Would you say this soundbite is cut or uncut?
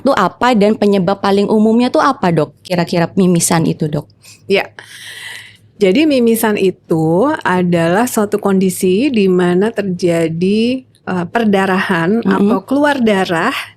uncut